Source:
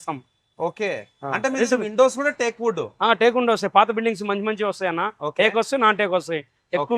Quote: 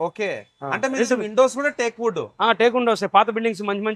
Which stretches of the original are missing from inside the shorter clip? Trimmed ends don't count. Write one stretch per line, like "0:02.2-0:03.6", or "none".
none